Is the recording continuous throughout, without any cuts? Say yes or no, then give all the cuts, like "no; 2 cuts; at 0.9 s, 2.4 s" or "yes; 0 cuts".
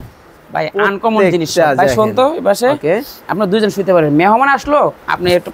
yes; 0 cuts